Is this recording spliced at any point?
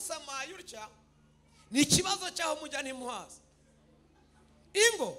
no; 0 cuts

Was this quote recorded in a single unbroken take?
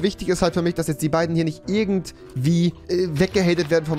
yes; 0 cuts

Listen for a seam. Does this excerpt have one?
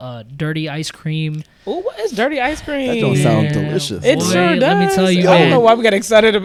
no; 0 cuts

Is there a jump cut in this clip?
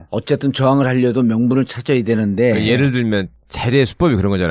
yes; 1 cut; at 1.6 s

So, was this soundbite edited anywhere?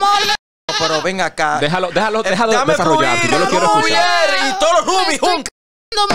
no; 0 cuts

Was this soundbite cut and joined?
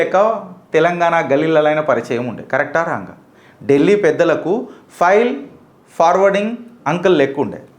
no; 0 cuts

